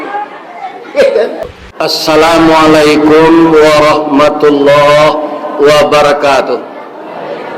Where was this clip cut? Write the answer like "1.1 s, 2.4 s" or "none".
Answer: 1.4 s